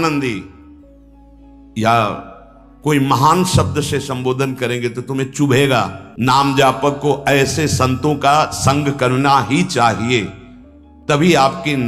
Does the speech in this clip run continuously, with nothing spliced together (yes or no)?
no